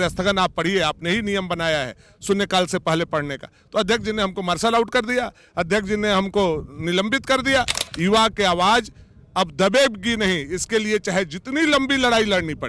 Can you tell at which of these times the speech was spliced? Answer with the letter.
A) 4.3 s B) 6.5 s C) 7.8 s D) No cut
C